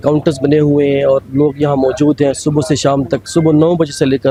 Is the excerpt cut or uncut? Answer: uncut